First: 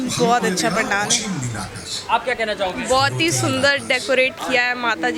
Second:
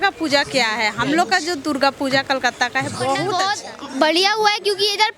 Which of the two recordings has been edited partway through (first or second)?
second